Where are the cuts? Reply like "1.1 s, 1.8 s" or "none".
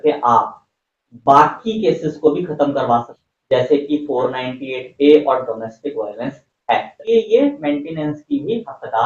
3.1 s, 6.9 s